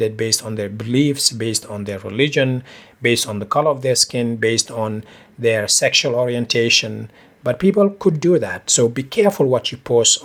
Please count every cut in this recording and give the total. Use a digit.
0